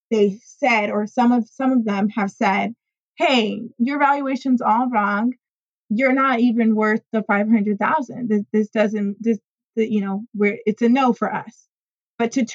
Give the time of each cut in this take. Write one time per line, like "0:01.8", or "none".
0:05.7